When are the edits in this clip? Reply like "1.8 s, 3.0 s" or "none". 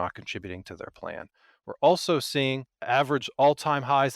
2.7 s